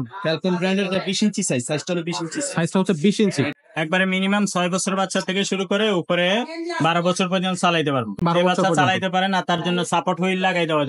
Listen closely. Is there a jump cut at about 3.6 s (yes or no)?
yes